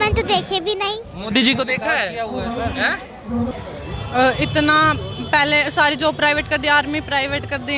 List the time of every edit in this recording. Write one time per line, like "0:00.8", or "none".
0:03.5

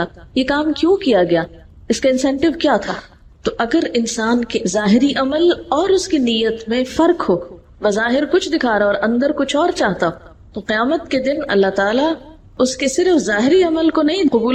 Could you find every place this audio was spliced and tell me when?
none

